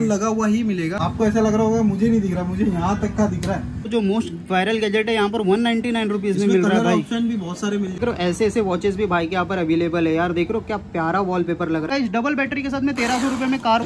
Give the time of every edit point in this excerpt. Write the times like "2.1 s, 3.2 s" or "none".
1.0 s, 3.8 s, 8.0 s, 11.9 s